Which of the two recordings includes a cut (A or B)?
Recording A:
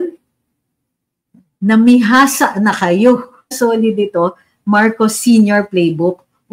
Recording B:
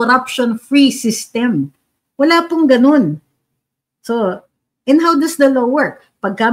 A